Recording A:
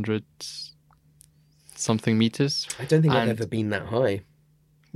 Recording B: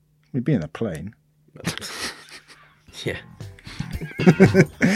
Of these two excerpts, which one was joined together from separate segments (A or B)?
A